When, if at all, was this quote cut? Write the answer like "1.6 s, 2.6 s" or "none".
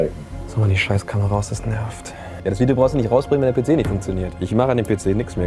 2.4 s, 4.3 s